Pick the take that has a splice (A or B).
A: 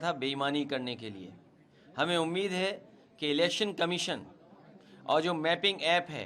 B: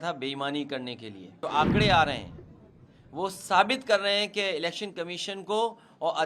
B